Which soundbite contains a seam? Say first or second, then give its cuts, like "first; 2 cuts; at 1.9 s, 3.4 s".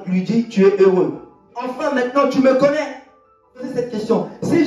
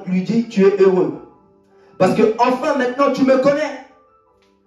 first; 2 cuts; at 1.8 s, 3.8 s